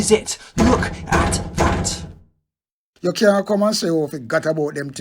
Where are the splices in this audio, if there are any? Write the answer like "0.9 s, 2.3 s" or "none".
2.8 s